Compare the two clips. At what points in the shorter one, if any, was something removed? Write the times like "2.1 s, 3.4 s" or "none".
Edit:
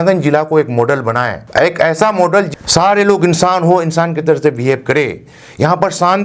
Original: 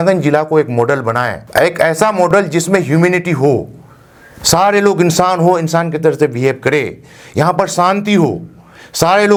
2.5 s